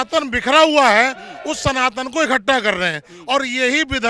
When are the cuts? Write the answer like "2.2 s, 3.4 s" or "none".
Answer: none